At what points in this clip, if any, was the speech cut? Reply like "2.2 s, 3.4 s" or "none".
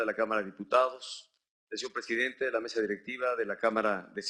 none